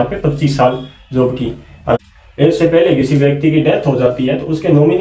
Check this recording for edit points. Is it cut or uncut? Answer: cut